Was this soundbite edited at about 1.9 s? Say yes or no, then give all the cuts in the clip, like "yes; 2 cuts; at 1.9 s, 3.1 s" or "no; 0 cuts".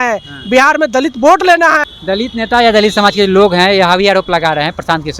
yes; 1 cut; at 1.9 s